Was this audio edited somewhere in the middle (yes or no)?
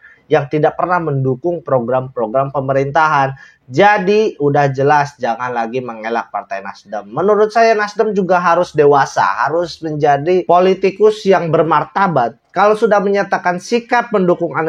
no